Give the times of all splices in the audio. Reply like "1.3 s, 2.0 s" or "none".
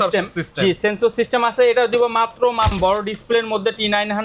2.7 s